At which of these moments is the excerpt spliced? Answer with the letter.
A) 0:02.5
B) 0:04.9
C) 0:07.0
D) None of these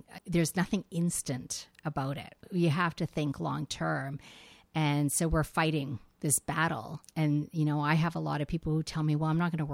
A